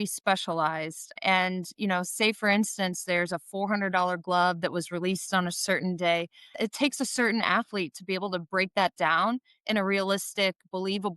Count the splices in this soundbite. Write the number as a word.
two